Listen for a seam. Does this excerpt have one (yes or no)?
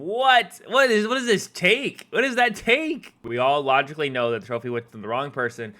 yes